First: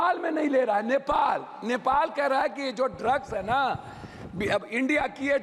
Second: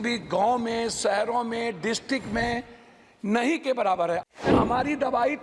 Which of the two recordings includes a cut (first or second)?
second